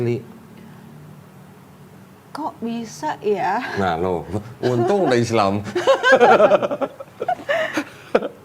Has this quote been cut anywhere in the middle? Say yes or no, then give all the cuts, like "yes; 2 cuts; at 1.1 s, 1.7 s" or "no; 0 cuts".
no; 0 cuts